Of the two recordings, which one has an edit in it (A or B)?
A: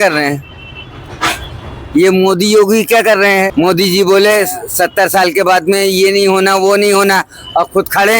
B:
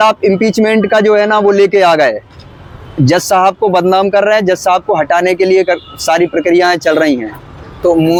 A